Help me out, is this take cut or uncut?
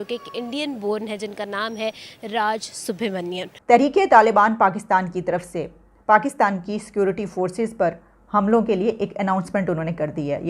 cut